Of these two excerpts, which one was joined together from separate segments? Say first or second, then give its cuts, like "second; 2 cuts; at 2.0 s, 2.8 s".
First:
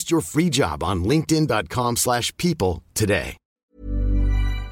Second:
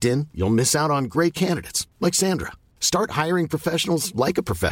first; 1 cut; at 3.7 s